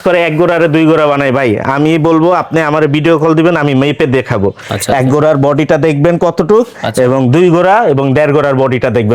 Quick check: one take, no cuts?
yes; 0 cuts

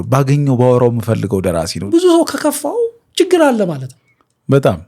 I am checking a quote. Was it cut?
yes; 1 cut; at 1.9 s

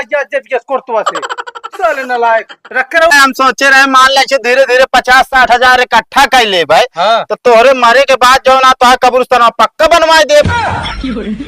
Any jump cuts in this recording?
yes; 1 cut; at 3.1 s

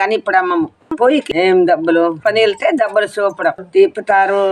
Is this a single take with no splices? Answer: no; 3 cuts; at 1.2 s, 2.2 s, 3.6 s

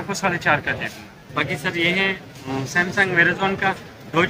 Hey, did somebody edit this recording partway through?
yes; 1 cut; at 1.2 s

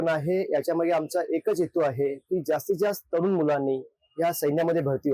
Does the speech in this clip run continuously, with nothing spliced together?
yes; 0 cuts

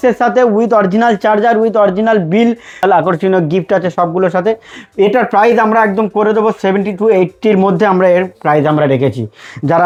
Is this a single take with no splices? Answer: yes; 0 cuts

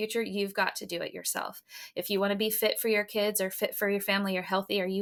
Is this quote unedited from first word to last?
yes; 0 cuts

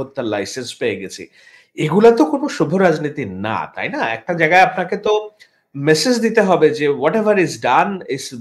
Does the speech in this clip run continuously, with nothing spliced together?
yes; 0 cuts

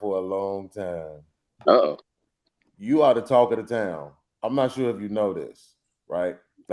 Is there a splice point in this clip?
no; 0 cuts

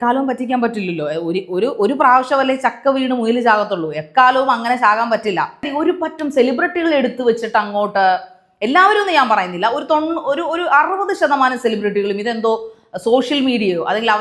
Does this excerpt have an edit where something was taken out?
yes; 1 cut; at 5.7 s

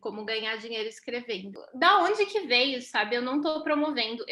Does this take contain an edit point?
yes; 1 cut; at 1.6 s

